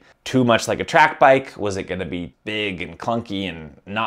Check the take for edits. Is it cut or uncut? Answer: cut